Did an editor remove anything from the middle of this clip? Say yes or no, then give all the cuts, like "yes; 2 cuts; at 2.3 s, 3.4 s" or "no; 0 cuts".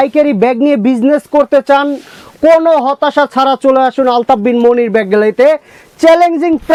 no; 0 cuts